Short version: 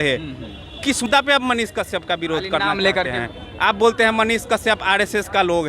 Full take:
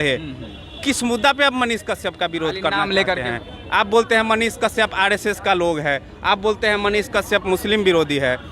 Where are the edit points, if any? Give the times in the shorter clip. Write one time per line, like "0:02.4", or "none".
0:01.1